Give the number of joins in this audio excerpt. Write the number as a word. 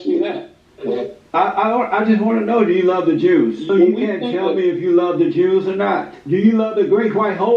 two